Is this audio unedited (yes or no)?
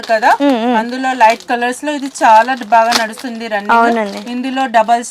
yes